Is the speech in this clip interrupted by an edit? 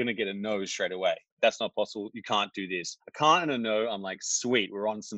yes; 2 cuts; at 1.3 s, 3.0 s

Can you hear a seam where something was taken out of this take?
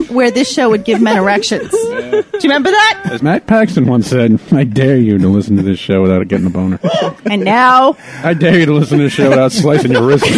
no; 0 cuts

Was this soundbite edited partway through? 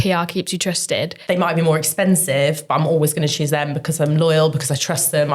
yes; 1 cut; at 1.2 s

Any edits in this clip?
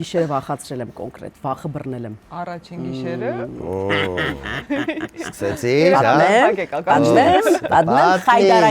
no; 0 cuts

